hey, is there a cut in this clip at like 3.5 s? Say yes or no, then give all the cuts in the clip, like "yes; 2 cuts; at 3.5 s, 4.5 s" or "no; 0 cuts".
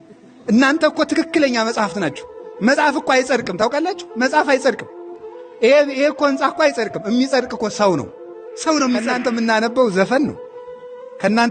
no; 1 cut; at 9.1 s